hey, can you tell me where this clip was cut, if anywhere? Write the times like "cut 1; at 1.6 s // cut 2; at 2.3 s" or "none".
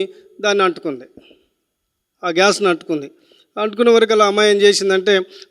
none